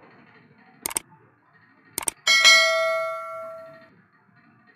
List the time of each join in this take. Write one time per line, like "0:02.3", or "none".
0:03.9